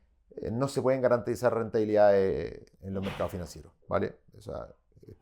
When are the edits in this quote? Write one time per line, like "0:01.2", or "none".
0:02.7

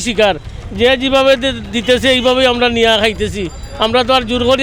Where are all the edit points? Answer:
none

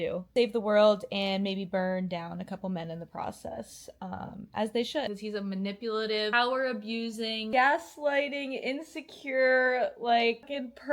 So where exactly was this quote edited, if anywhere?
0:05.1

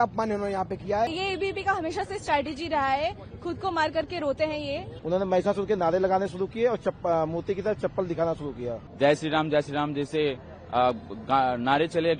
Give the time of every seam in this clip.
0:01.1
0:04.9
0:08.8

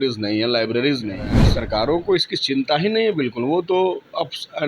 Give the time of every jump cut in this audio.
0:01.4

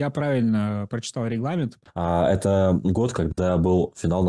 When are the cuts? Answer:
0:01.8

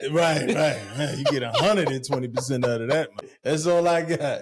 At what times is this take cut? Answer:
0:03.3

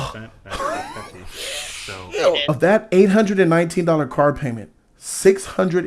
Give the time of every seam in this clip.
0:02.4

